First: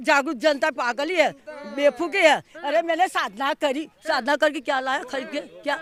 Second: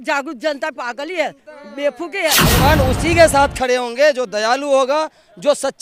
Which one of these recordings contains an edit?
second; 1 cut; at 2.4 s

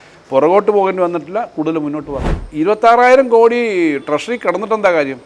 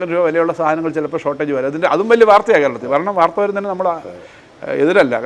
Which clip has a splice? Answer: first; 1 cut; at 2.4 s

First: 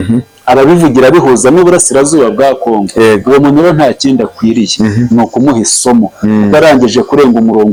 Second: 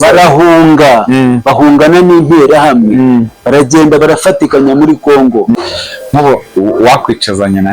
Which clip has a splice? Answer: second; 1 cut; at 5.5 s

